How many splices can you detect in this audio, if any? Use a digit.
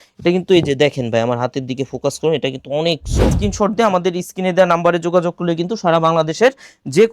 1